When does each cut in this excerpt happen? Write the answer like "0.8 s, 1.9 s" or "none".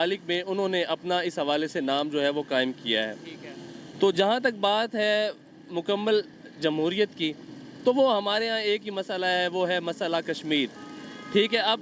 none